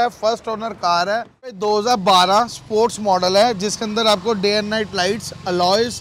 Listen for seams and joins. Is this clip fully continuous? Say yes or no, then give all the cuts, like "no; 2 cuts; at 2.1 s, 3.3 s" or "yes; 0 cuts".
no; 1 cut; at 1.6 s